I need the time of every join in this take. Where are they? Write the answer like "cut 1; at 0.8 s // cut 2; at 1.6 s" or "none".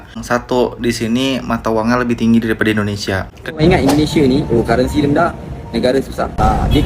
cut 1; at 3.5 s